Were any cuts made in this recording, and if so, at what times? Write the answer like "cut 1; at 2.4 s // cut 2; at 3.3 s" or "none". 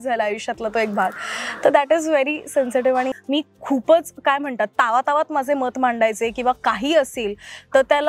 cut 1; at 3.2 s